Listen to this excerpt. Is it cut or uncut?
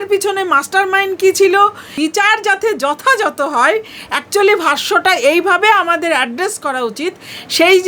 cut